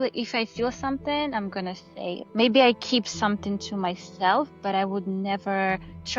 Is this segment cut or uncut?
cut